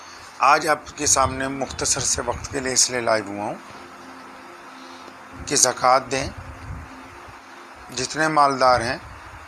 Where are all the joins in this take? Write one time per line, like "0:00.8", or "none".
none